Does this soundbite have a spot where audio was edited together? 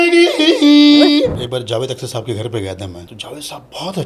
yes; 2 cuts; at 1.4 s, 3.0 s

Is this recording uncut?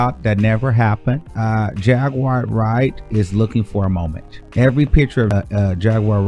no; 2 cuts; at 1.3 s, 5.3 s

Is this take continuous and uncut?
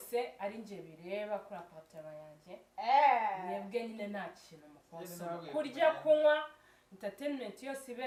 yes; 0 cuts

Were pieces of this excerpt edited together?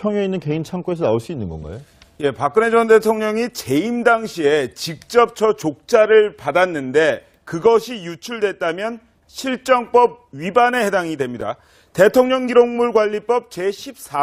no; 0 cuts

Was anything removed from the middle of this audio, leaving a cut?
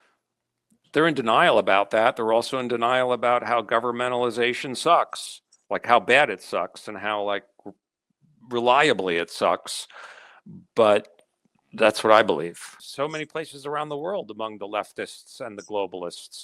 yes; 1 cut; at 12.8 s

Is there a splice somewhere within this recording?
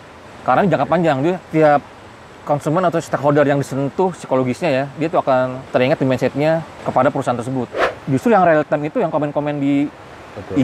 yes; 4 cuts; at 1.4 s, 5.6 s, 6.8 s, 7.9 s

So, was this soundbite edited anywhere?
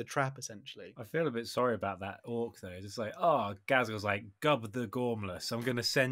yes; 1 cut; at 0.9 s

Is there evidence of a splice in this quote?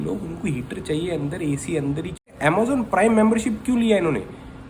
yes; 1 cut; at 2.3 s

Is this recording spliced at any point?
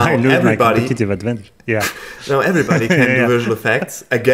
no; 0 cuts

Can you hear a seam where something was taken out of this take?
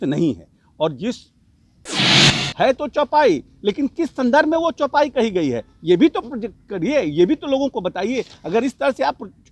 yes; 1 cut; at 2.0 s

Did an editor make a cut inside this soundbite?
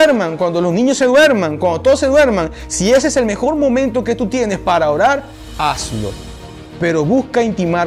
no; 0 cuts

